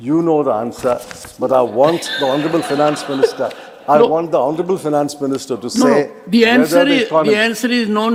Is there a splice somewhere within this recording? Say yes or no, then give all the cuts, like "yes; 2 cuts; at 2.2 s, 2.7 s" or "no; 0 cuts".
no; 0 cuts